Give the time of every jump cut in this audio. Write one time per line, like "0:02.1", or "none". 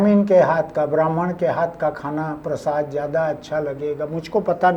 none